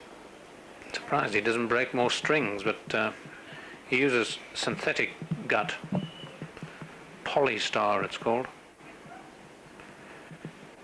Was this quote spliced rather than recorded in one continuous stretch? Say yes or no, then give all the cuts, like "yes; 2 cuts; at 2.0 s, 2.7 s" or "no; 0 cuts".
no; 0 cuts